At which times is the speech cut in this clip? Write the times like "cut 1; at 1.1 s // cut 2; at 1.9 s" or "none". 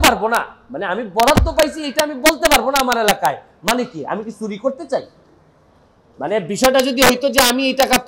none